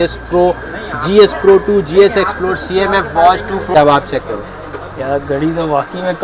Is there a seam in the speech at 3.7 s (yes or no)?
yes